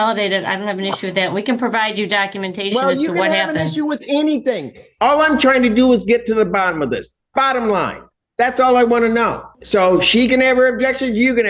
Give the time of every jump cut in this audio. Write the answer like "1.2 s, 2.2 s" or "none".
9.5 s